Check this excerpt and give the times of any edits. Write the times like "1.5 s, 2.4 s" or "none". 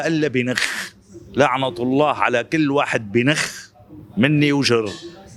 none